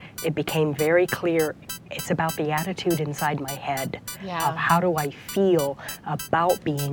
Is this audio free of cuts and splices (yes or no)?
yes